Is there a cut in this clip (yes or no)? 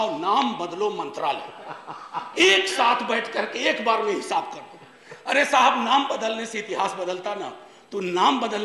no